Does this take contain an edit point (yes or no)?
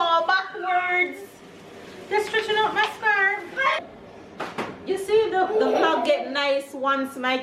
yes